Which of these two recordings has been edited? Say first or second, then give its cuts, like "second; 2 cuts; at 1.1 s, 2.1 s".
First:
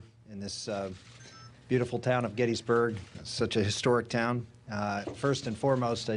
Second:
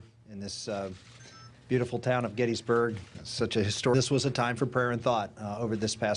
first; 1 cut; at 3.9 s